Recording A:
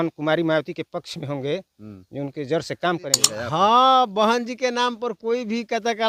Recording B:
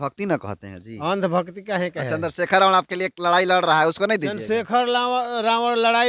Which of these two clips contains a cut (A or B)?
A